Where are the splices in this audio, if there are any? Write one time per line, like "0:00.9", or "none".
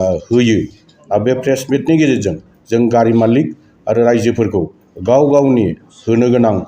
0:00.9